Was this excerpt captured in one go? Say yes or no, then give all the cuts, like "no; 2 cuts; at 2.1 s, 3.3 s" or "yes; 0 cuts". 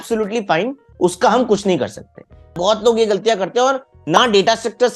no; 1 cut; at 2.5 s